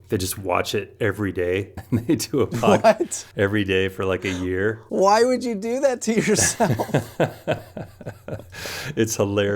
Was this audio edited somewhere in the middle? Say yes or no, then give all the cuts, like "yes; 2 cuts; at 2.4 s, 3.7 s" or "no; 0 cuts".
yes; 3 cuts; at 1.8 s, 3.2 s, 4.8 s